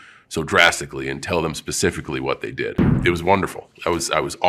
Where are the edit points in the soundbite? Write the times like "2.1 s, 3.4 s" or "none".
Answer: 2.9 s